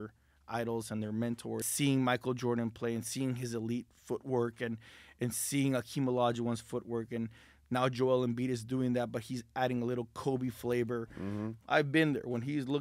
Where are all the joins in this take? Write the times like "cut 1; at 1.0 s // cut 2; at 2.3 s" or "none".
cut 1; at 1.7 s // cut 2; at 11.5 s